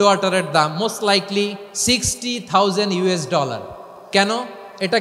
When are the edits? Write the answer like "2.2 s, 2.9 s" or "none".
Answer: 1.7 s, 3.9 s